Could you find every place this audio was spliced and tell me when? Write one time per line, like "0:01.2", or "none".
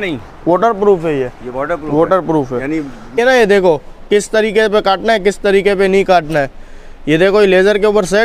0:03.2